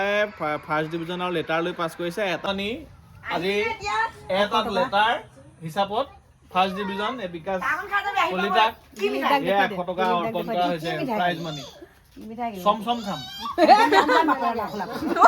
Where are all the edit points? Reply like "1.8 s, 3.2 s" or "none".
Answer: 2.4 s